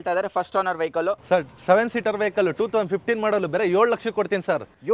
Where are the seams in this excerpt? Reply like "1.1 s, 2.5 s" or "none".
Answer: 1.2 s